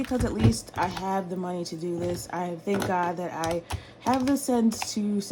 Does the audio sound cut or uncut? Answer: uncut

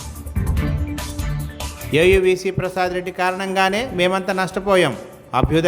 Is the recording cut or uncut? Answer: cut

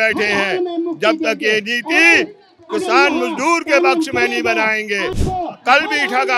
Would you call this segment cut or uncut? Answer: cut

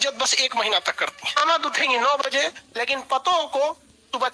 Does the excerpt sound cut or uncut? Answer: cut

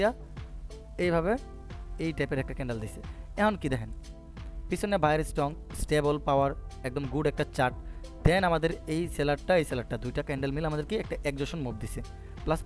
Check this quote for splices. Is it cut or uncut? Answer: uncut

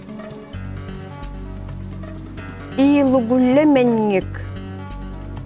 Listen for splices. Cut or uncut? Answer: uncut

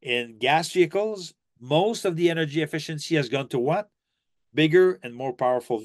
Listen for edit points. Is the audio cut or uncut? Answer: uncut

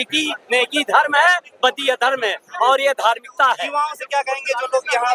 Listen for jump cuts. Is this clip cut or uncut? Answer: uncut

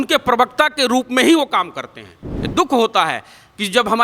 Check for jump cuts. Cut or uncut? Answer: uncut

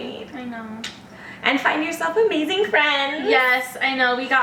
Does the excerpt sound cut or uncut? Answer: uncut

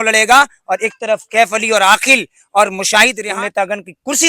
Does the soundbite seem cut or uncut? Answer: cut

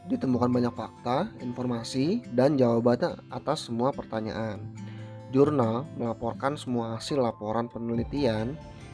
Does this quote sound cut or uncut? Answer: uncut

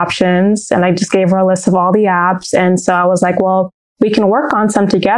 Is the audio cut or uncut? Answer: uncut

